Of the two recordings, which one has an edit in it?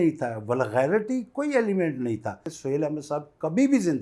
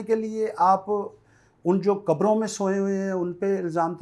first; 1 cut; at 2.5 s

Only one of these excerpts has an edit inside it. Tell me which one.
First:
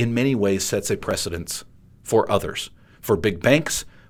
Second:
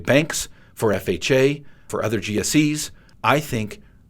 second; 1 cut; at 1.8 s

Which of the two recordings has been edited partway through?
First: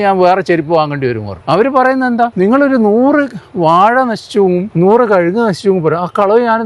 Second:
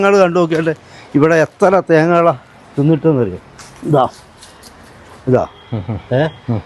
first; 3 cuts; at 1.3 s, 2.3 s, 4.7 s

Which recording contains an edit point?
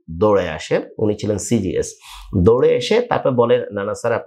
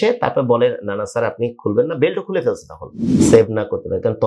second; 1 cut; at 3.2 s

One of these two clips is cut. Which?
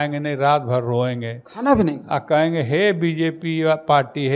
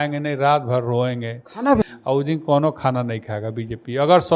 second; 1 cut; at 1.8 s

